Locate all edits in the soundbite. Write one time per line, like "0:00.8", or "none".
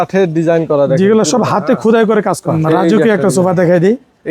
0:02.6